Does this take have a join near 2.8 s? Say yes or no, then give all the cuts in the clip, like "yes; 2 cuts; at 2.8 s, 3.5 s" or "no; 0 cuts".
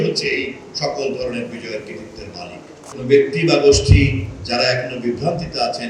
yes; 1 cut; at 2.8 s